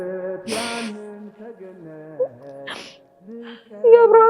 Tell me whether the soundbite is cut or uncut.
uncut